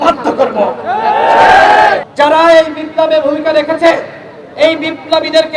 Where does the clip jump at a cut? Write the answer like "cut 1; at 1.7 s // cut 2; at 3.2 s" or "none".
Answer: cut 1; at 2.1 s